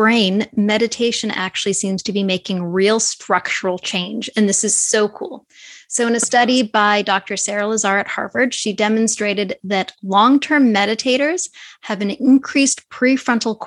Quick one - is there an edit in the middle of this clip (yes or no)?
no